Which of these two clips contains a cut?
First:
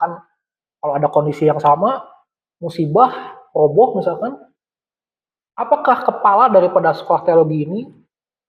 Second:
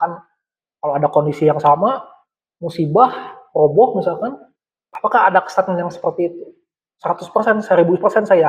second; 1 cut; at 4.9 s

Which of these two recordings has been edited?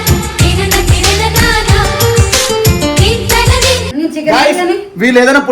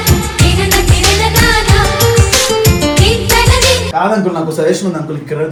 first; 1 cut; at 3.9 s

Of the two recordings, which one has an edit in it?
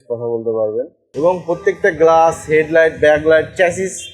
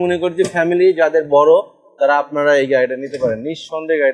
first; 1 cut; at 1.1 s

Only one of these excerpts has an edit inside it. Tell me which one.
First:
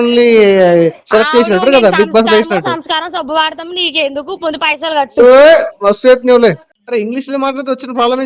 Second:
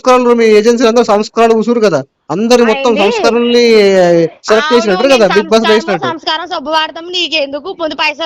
first; 1 cut; at 6.7 s

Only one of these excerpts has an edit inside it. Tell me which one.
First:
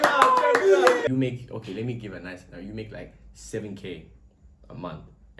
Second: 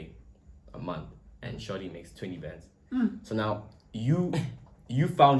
first; 1 cut; at 1.1 s

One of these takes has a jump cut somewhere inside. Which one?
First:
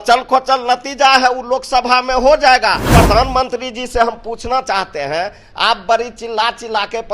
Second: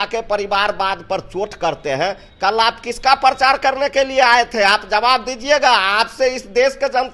first; 1 cut; at 2.9 s

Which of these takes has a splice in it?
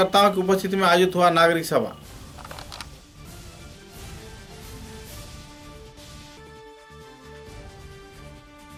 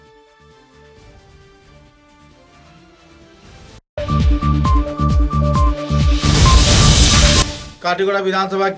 second; 2 cuts; at 3.8 s, 7.4 s

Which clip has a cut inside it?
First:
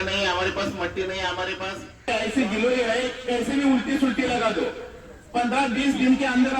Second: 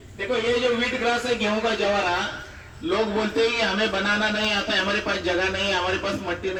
first; 1 cut; at 2.1 s

